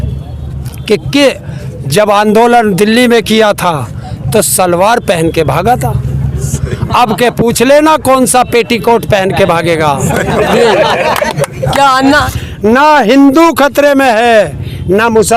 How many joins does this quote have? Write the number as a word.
one